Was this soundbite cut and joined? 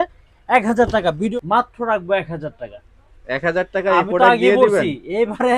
yes; 1 cut; at 1.3 s

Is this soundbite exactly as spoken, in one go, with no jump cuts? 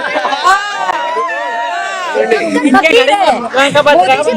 yes; 0 cuts

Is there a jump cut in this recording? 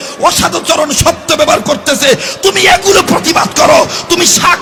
no; 0 cuts

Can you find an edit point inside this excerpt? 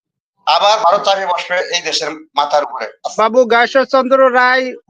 yes; 1 cut; at 3.0 s

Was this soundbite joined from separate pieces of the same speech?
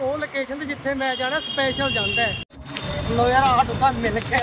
yes; 1 cut; at 2.5 s

